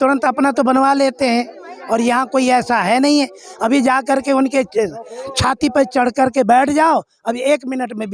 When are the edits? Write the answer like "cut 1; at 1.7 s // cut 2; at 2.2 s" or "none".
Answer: none